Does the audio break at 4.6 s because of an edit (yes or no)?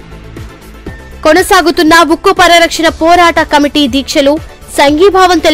no